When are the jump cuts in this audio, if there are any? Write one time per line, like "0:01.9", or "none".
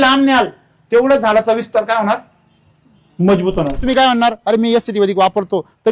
0:03.8